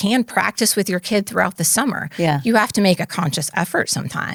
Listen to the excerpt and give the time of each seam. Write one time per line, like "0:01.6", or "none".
none